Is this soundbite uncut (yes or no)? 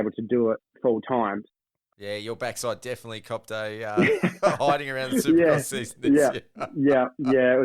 no